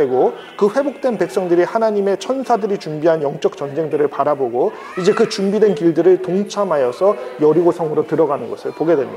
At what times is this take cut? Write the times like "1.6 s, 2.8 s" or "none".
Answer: none

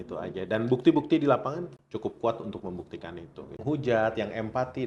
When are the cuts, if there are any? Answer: 1.8 s, 3.6 s

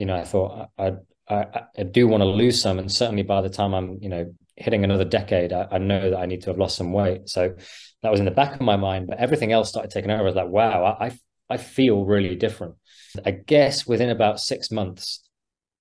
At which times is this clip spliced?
13.2 s

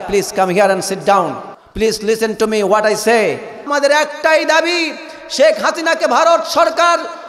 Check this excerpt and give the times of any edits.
1.6 s, 3.7 s

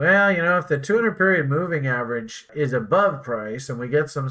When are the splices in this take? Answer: 2.5 s

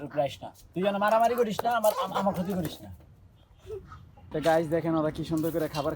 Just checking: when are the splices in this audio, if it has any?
4.2 s

